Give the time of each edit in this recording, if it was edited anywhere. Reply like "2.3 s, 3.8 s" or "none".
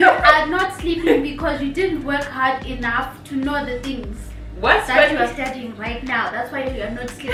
none